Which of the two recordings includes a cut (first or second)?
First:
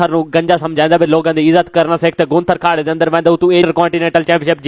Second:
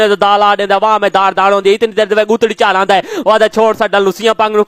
first